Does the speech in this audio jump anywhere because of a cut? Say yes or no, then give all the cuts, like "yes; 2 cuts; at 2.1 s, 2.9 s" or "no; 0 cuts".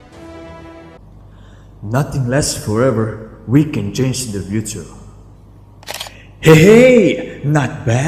yes; 1 cut; at 0.9 s